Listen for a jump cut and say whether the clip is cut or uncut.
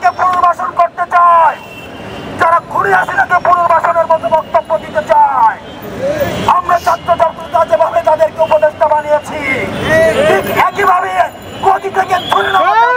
uncut